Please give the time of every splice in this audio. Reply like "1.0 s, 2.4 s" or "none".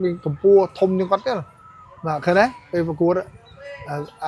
none

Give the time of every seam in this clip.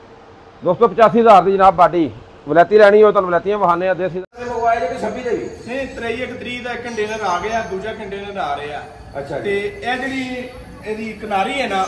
4.3 s

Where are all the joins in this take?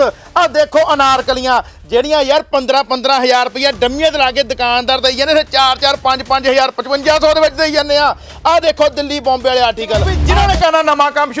10.2 s

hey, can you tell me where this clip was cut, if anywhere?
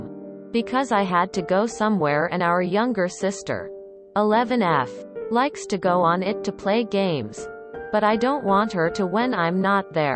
6.3 s

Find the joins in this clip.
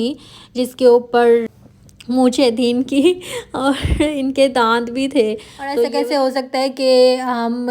1.4 s, 5.8 s

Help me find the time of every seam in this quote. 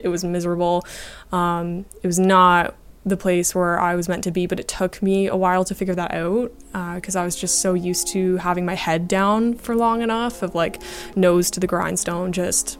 none

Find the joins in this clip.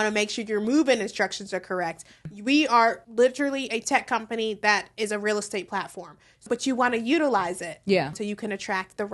2.3 s, 3.0 s, 6.5 s, 8.1 s

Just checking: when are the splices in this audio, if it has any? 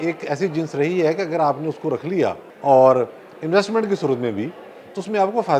2.5 s

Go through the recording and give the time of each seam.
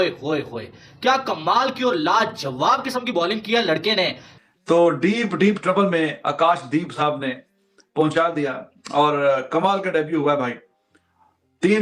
4.3 s

